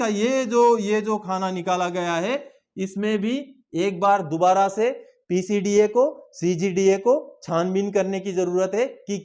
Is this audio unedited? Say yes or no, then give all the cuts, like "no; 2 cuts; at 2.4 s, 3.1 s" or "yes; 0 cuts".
yes; 0 cuts